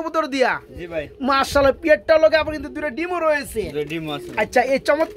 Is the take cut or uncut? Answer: uncut